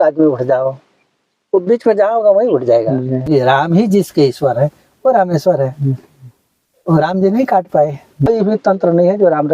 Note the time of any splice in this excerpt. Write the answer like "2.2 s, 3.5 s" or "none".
3.3 s, 8.3 s